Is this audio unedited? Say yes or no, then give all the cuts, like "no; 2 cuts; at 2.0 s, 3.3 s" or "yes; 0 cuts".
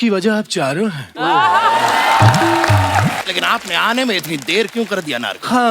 no; 1 cut; at 3.2 s